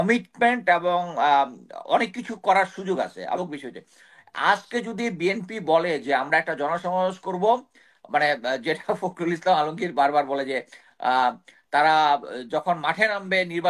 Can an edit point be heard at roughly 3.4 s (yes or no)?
yes